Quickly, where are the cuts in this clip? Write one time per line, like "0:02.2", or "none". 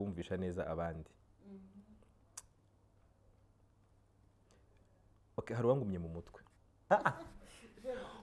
0:06.9